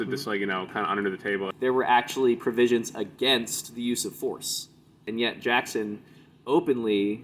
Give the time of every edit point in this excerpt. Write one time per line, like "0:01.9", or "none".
0:01.5
0:05.1